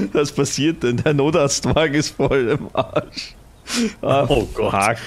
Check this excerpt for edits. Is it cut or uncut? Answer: uncut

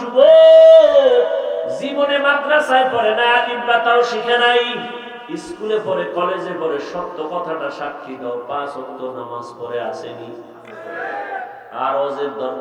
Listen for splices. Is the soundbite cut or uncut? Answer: cut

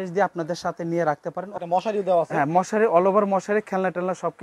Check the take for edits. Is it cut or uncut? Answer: cut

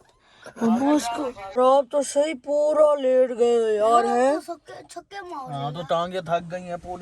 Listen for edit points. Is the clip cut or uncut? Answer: cut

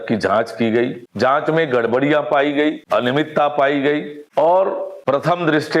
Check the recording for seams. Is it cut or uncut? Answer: cut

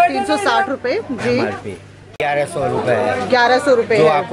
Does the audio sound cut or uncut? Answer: cut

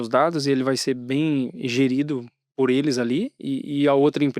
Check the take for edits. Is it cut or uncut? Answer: uncut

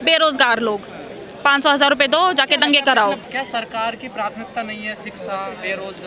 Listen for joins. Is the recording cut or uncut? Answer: uncut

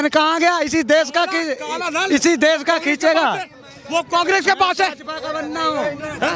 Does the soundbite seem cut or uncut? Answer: uncut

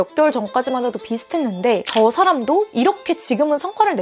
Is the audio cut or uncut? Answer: uncut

